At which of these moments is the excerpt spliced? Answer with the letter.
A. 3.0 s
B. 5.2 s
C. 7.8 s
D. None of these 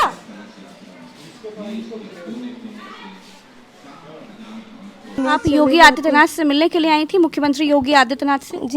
B